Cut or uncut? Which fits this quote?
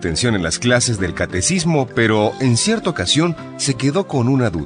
uncut